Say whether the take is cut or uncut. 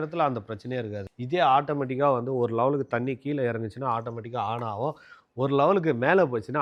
uncut